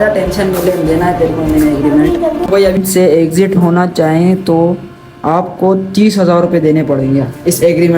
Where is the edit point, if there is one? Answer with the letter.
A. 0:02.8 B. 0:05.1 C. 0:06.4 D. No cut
A